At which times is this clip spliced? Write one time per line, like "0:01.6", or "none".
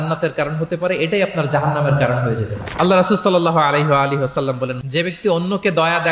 0:04.8

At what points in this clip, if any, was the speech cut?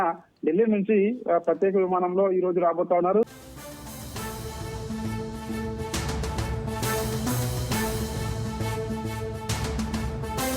0:03.3

